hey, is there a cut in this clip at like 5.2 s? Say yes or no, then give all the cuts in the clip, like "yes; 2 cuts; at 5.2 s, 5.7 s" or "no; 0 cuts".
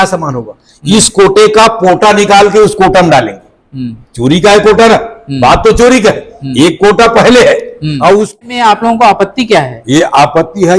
no; 1 cut; at 8.4 s